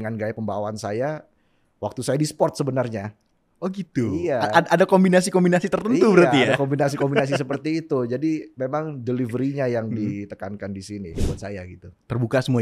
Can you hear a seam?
yes; 1 cut; at 11.2 s

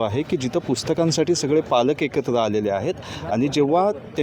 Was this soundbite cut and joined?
no; 0 cuts

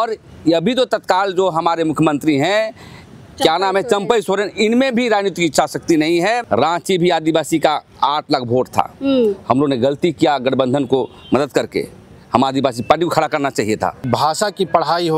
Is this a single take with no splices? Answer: no; 2 cuts; at 6.4 s, 14.1 s

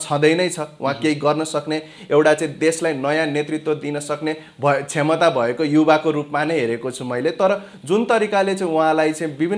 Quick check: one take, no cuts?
yes; 0 cuts

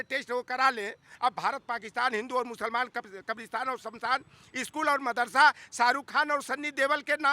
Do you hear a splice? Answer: yes; 1 cut; at 1.1 s

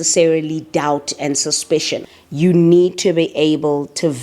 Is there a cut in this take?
yes; 1 cut; at 2.2 s

